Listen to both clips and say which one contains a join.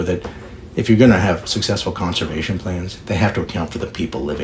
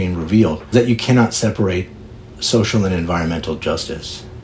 second; 2 cuts; at 0.7 s, 2.3 s

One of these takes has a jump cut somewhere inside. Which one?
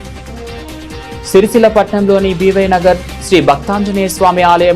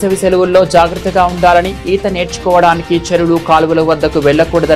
first; 1 cut; at 1.3 s

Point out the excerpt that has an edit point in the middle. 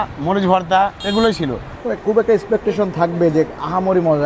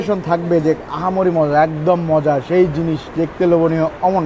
first; 2 cuts; at 1.0 s, 1.7 s

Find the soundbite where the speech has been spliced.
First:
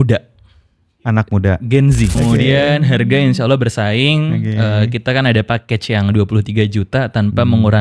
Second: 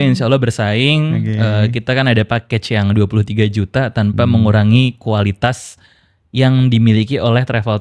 first; 1 cut; at 2.1 s

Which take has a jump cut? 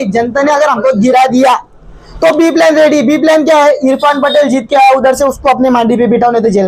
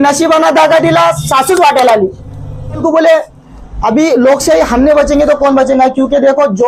second; 1 cut; at 2.8 s

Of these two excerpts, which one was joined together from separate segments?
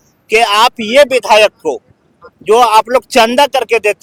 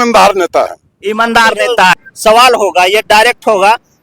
second; 1 cut; at 2.1 s

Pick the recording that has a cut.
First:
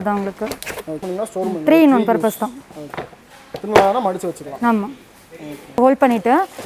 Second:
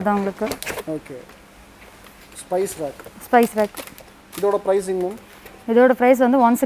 first; 2 cuts; at 1.0 s, 5.8 s

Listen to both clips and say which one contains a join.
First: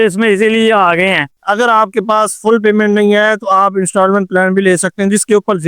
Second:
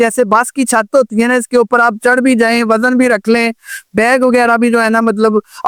first; 1 cut; at 1.4 s

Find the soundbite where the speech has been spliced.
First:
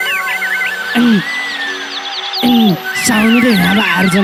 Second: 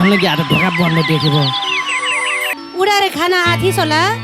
second; 1 cut; at 2.6 s

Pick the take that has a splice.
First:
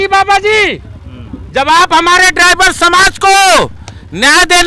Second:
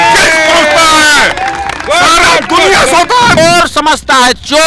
second; 1 cut; at 3.4 s

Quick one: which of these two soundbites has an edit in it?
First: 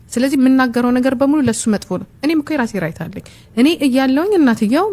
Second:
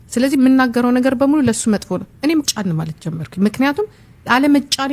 second; 1 cut; at 2.5 s

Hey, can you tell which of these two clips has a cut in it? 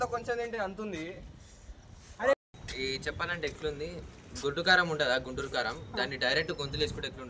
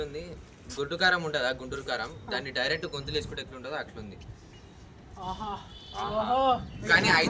first; 1 cut; at 2.3 s

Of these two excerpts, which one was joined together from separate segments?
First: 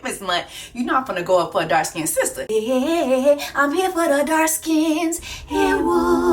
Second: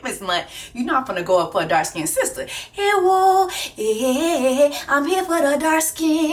first; 1 cut; at 2.4 s

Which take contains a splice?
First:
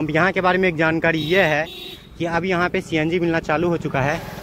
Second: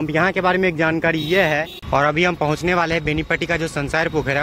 second; 1 cut; at 1.7 s

